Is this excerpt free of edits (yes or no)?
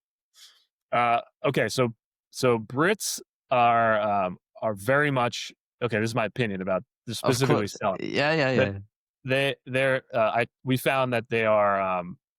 yes